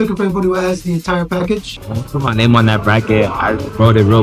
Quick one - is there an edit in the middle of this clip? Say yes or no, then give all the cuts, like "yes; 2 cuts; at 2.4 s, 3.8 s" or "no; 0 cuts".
yes; 1 cut; at 1.8 s